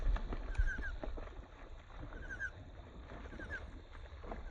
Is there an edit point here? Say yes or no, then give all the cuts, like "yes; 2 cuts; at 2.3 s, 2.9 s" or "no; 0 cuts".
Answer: no; 0 cuts